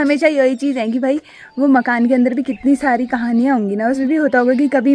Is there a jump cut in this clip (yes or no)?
yes